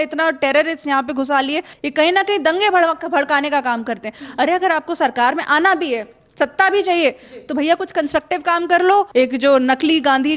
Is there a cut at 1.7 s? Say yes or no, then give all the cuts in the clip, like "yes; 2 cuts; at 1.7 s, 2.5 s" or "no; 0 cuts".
yes; 2 cuts; at 1.7 s, 9.1 s